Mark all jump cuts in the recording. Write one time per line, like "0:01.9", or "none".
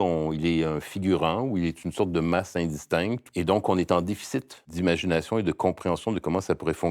0:03.2
0:04.7